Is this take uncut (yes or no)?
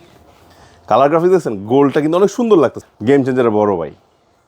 no